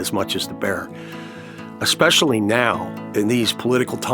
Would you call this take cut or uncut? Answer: cut